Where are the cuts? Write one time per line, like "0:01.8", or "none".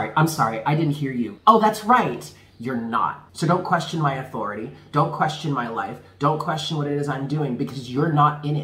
0:01.3
0:03.2